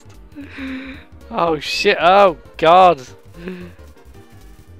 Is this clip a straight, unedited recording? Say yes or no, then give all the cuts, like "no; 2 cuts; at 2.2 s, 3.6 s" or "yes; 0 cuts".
no; 1 cut; at 3.7 s